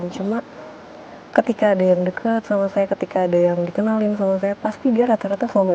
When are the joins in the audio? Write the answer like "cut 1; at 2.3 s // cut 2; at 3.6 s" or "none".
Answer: none